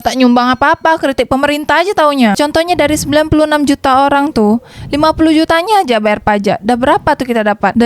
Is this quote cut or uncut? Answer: cut